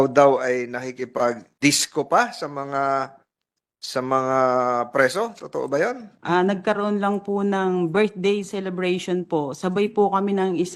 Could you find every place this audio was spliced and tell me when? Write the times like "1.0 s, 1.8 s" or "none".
1.5 s, 6.1 s